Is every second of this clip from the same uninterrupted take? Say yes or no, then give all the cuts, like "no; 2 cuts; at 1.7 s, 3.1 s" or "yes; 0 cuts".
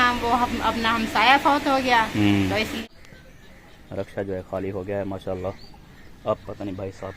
no; 1 cut; at 2.8 s